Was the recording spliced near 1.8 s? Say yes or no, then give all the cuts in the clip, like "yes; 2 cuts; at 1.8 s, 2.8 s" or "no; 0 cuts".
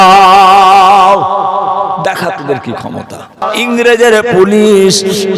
no; 1 cut; at 3.4 s